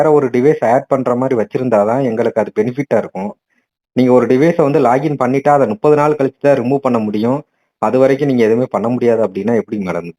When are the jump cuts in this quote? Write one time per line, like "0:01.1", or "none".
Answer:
none